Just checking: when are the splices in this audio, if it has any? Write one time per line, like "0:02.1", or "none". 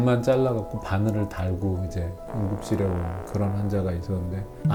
none